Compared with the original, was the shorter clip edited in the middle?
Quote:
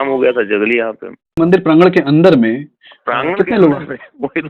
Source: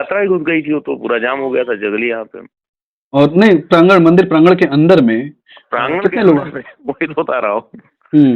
yes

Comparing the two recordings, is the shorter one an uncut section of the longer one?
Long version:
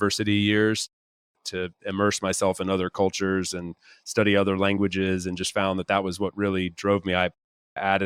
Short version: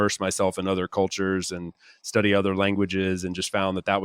yes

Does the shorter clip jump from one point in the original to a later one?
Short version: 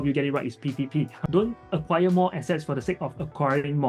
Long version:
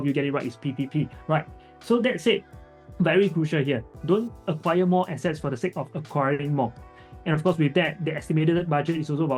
yes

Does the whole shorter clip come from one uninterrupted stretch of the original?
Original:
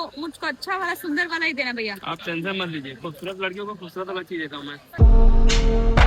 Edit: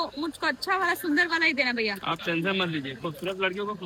yes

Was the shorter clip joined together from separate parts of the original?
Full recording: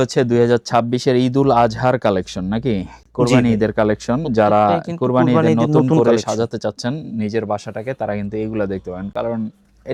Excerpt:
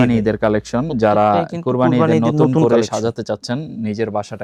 no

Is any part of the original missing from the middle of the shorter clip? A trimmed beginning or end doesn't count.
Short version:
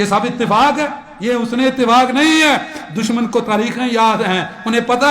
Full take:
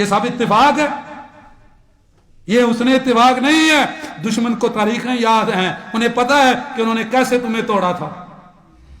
yes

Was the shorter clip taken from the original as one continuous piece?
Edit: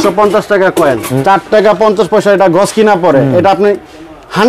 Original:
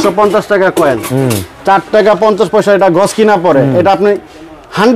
no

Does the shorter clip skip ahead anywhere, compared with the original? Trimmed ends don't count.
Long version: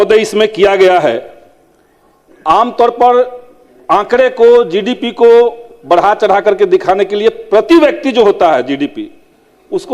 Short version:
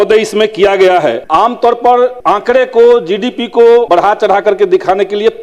yes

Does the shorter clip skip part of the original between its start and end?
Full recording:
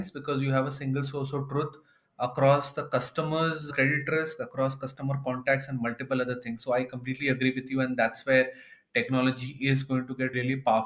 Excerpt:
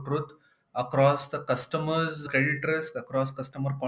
no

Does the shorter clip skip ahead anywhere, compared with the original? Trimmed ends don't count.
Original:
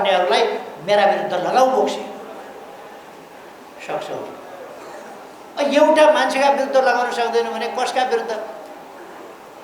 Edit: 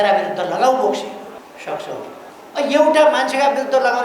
yes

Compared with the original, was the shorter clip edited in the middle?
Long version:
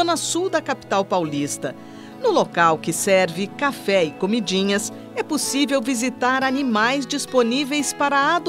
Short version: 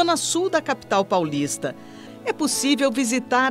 yes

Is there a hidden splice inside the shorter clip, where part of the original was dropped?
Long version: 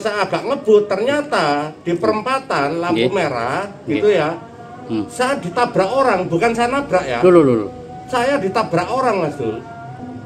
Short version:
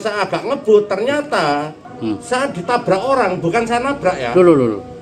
yes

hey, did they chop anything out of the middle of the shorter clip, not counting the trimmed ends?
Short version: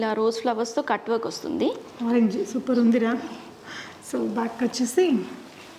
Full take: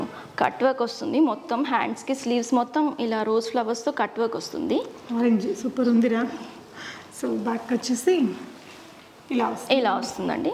no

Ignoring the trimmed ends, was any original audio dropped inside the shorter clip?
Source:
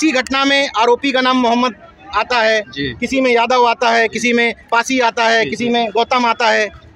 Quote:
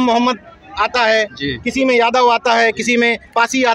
no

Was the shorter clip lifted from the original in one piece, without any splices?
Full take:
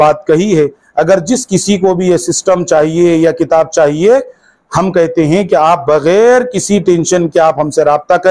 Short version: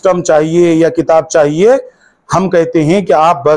yes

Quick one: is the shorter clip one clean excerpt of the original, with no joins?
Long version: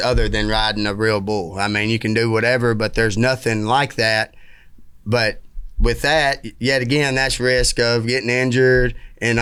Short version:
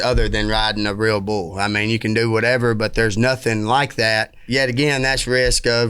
no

